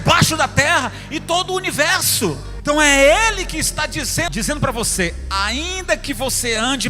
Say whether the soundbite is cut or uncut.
cut